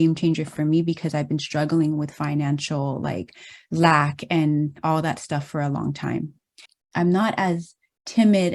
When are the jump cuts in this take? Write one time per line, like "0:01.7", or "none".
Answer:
0:06.7